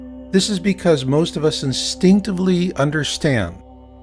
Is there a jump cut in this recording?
no; 0 cuts

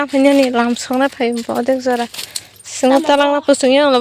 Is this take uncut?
yes; 0 cuts

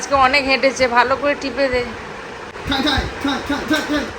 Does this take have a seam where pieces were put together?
yes; 1 cut; at 2.5 s

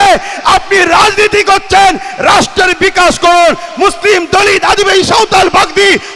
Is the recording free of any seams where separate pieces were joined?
yes; 0 cuts

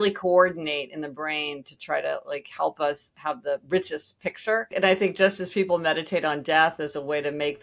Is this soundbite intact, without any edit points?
no; 1 cut; at 4.7 s

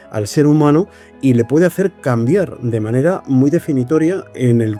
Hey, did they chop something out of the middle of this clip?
no; 0 cuts

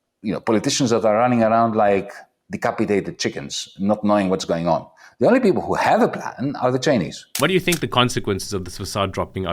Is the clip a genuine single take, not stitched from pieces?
no; 1 cut; at 7.2 s

